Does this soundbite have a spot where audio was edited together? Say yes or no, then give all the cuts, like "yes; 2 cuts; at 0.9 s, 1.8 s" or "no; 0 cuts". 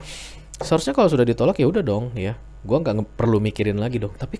no; 0 cuts